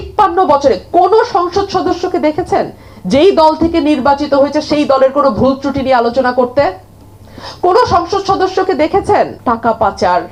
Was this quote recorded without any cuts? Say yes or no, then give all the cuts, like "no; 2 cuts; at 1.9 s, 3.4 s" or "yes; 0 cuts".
yes; 0 cuts